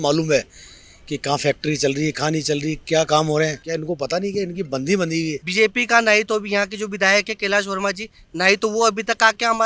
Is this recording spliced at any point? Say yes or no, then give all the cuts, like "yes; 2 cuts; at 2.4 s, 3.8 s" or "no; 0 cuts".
yes; 2 cuts; at 3.6 s, 5.4 s